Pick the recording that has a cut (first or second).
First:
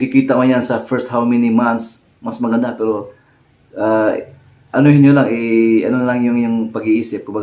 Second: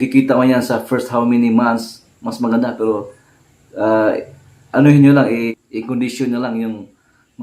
second